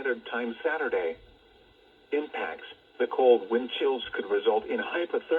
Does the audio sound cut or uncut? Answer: cut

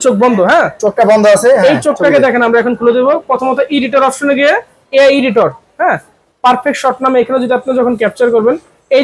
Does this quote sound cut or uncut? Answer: uncut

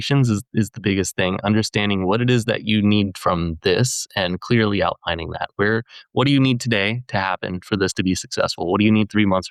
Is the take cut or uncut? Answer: uncut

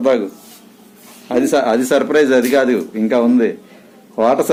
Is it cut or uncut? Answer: uncut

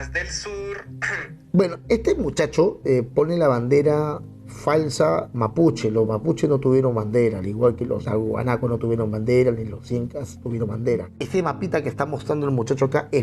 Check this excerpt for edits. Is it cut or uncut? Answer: cut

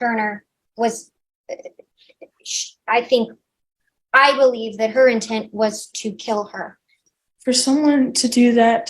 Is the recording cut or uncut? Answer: cut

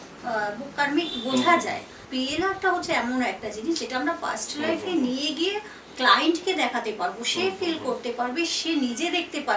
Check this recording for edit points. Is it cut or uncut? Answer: cut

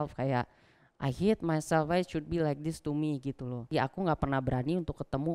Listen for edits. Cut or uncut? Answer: cut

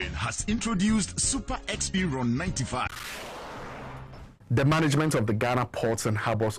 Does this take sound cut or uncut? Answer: cut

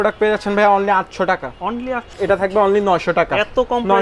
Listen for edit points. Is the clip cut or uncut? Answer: cut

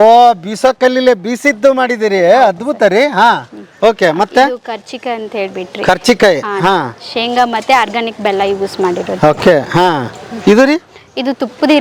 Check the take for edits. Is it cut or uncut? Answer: uncut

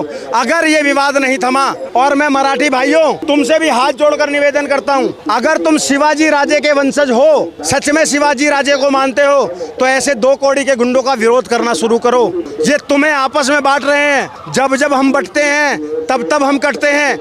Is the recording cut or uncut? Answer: cut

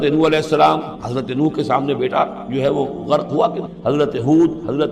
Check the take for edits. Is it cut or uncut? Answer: cut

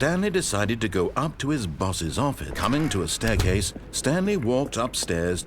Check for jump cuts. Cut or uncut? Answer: cut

